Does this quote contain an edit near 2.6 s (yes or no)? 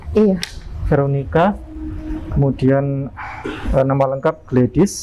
no